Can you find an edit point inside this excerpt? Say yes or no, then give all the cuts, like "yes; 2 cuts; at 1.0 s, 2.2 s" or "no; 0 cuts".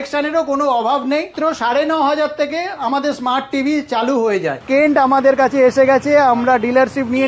yes; 2 cuts; at 1.3 s, 4.6 s